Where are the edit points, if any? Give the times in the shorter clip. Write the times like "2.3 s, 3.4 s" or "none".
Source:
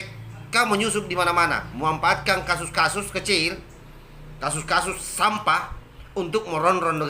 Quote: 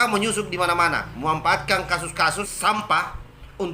2.5 s